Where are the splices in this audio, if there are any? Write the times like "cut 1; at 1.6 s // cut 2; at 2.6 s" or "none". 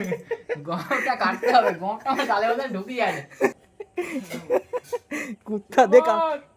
cut 1; at 3.5 s